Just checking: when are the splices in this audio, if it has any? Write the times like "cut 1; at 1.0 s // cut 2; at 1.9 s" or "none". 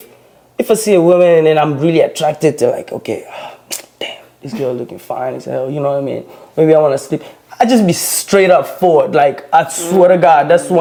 none